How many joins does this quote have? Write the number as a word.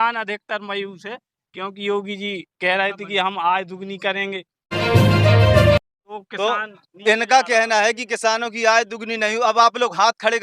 two